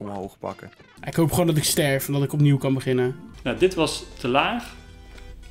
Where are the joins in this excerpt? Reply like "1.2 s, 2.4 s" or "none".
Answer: 1.0 s, 3.3 s